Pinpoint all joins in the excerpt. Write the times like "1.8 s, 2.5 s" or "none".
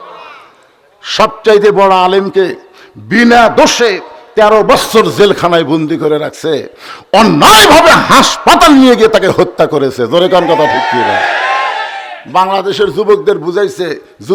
none